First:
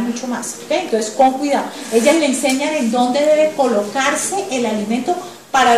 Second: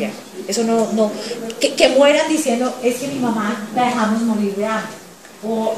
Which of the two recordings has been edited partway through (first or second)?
second